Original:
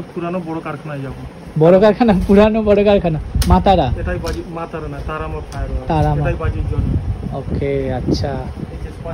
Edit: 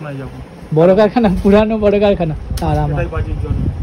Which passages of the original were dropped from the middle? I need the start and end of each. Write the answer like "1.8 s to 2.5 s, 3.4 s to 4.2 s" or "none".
3.3 s to 5.7 s